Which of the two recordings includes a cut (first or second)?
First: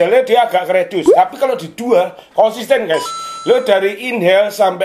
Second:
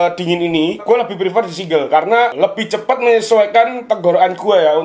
second